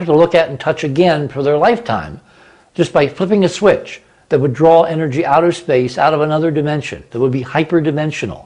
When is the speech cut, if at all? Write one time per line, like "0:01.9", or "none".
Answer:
none